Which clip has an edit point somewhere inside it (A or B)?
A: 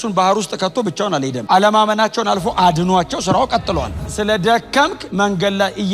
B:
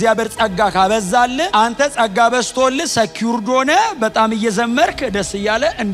A